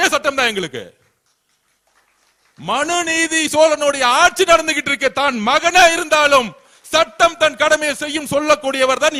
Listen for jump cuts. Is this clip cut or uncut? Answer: uncut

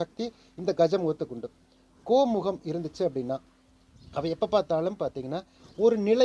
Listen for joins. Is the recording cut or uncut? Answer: uncut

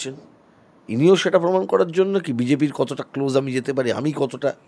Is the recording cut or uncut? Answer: uncut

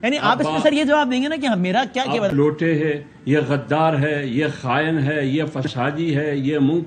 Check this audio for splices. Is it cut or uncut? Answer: cut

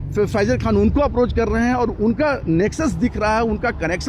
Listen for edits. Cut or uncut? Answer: uncut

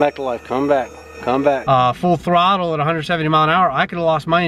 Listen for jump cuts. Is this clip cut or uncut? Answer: cut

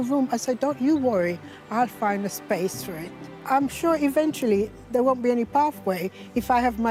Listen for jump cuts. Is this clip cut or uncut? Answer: uncut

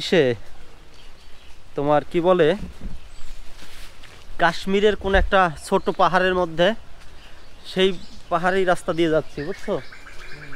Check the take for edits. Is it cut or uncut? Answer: uncut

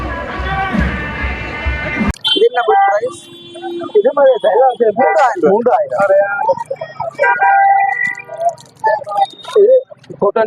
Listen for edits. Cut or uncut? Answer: cut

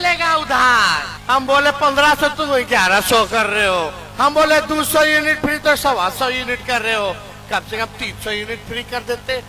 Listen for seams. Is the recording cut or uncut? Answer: cut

